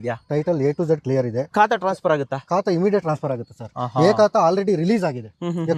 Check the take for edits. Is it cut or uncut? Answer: uncut